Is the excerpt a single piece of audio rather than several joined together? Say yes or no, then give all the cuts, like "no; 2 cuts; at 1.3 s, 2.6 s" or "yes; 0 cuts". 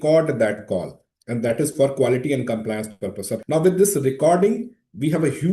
no; 1 cut; at 3.3 s